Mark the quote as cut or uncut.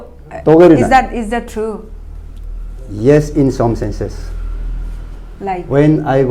uncut